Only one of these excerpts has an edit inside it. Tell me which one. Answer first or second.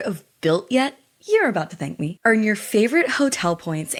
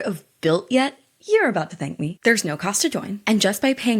second